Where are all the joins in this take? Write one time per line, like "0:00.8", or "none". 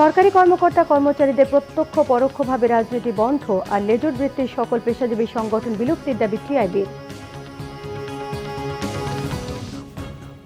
0:09.5